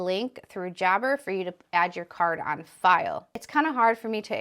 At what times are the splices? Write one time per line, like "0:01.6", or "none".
0:03.3